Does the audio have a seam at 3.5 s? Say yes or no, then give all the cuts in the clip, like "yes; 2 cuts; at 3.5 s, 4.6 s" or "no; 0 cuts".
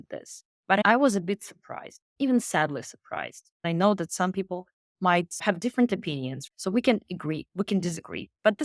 yes; 1 cut; at 3.5 s